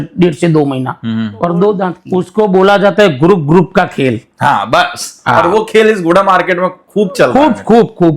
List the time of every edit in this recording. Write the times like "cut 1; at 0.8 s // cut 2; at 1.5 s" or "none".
cut 1; at 2.0 s

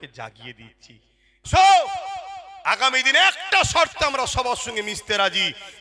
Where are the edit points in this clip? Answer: cut 1; at 1.5 s

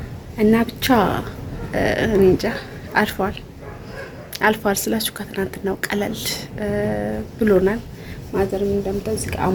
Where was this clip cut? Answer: none

